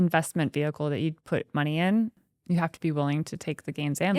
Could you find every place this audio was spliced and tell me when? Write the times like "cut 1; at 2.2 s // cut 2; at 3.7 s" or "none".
cut 1; at 2.2 s